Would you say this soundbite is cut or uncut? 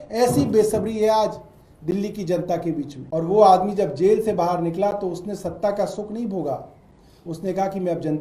cut